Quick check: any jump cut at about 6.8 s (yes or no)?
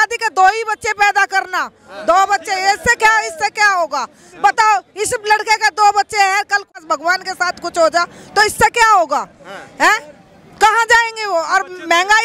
yes